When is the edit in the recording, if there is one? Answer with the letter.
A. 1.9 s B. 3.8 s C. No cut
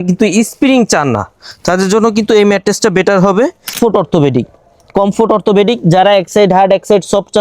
B